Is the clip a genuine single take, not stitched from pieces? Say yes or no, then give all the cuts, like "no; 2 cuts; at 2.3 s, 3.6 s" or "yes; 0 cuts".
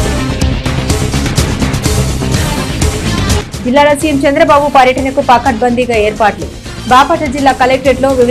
no; 1 cut; at 1.6 s